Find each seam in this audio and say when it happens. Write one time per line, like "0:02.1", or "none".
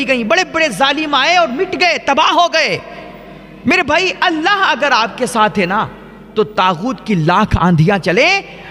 none

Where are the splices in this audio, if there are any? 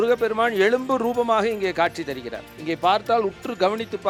none

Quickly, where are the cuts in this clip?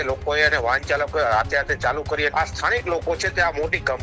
0:02.3

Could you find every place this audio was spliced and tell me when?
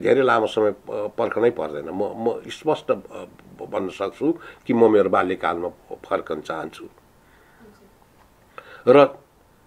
none

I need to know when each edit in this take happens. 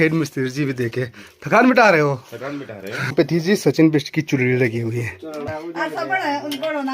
0:03.1
0:05.5

